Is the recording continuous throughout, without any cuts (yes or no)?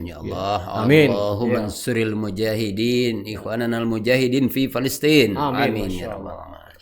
yes